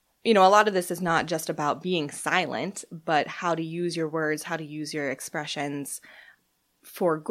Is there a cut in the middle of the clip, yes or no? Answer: yes